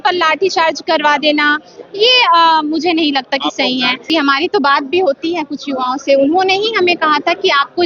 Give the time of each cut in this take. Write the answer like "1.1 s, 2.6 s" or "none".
none